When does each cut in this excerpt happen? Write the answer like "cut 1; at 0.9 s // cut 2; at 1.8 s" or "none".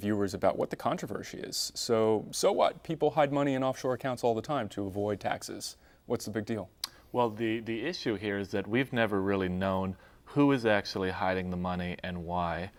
none